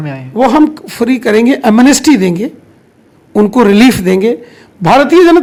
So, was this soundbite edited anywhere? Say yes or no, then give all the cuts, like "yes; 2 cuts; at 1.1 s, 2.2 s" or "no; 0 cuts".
no; 0 cuts